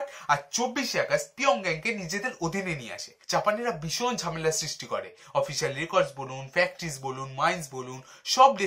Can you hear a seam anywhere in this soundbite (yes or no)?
yes